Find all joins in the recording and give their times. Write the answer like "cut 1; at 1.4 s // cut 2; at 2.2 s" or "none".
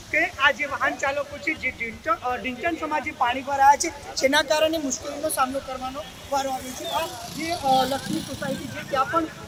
none